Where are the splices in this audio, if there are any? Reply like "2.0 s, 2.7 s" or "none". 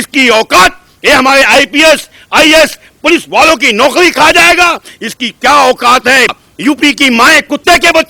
6.5 s